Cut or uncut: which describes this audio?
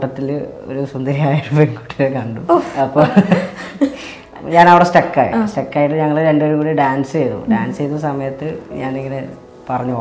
cut